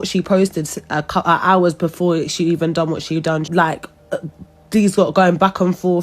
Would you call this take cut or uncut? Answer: cut